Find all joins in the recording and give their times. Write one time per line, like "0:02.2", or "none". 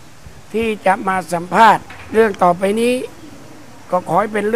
0:02.0